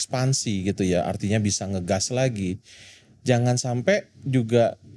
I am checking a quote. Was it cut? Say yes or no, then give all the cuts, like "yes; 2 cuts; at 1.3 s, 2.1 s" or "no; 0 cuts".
no; 0 cuts